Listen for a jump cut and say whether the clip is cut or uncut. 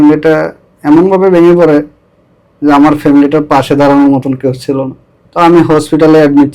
uncut